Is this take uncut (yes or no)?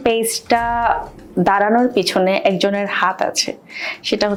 yes